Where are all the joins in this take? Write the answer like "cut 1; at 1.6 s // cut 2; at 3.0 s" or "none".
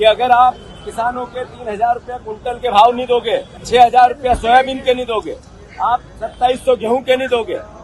cut 1; at 3.5 s